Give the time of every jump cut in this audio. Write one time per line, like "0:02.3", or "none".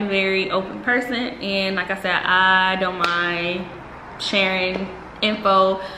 none